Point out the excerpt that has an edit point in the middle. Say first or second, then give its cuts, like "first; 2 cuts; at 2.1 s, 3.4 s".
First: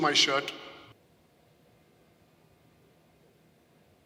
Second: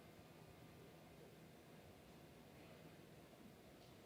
first; 1 cut; at 0.9 s